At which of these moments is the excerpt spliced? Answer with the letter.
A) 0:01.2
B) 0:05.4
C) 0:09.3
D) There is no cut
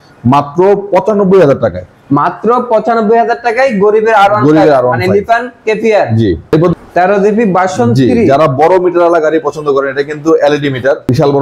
D